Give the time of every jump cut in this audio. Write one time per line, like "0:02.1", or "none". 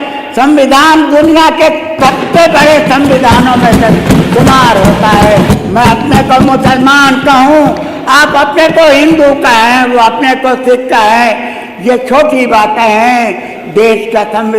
0:05.5